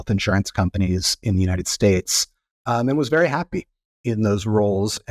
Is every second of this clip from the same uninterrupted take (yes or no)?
yes